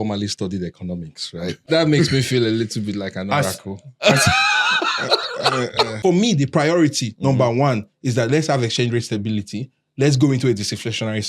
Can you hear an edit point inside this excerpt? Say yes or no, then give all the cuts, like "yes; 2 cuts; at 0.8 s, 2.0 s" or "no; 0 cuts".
yes; 2 cuts; at 1.7 s, 5.9 s